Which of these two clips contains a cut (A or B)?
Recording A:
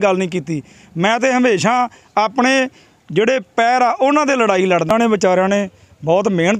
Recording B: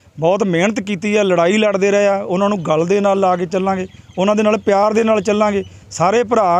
A